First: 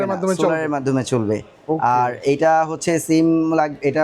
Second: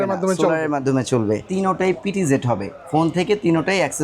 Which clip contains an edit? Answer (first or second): second